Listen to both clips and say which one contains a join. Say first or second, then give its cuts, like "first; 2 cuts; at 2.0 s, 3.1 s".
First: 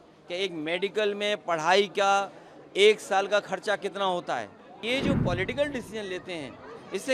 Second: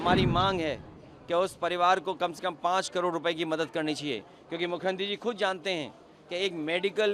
first; 1 cut; at 4.8 s